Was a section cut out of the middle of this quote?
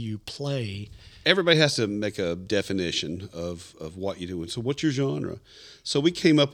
yes; 1 cut; at 1.1 s

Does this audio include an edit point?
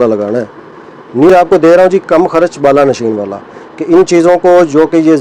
yes; 1 cut; at 1.3 s

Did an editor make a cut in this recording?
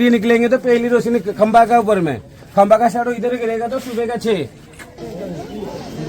yes; 1 cut; at 5.0 s

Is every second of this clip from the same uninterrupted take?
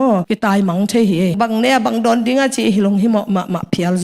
no; 1 cut; at 1.3 s

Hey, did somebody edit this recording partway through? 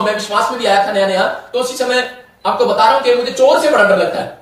no; 0 cuts

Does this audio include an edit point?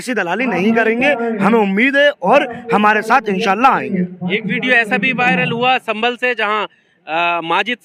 no; 0 cuts

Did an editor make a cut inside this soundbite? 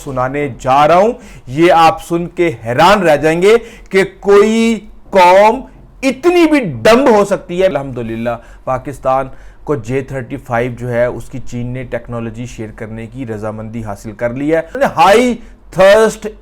yes; 2 cuts; at 7.7 s, 14.7 s

